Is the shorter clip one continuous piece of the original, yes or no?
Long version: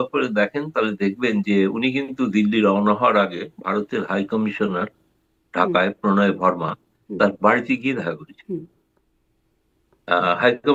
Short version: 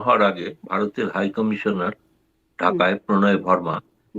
yes